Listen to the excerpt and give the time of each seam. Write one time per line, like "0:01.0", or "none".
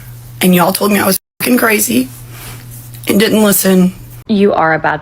0:04.1